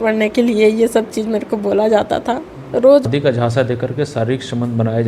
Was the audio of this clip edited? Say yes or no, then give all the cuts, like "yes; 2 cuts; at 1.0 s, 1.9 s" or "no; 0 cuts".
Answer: yes; 1 cut; at 3.1 s